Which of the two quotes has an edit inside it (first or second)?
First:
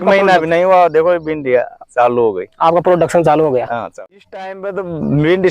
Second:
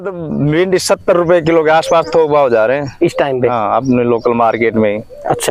first